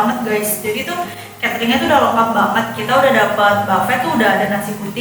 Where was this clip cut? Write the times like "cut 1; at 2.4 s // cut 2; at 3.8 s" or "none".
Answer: none